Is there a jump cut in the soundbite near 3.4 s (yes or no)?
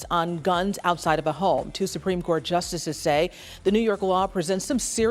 no